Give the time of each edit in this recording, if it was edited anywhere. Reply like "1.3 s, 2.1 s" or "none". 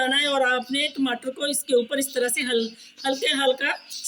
none